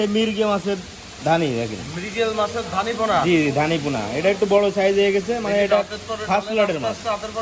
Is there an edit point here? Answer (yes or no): no